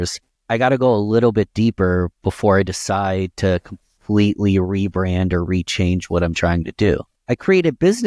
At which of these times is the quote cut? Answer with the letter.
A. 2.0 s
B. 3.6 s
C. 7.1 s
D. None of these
C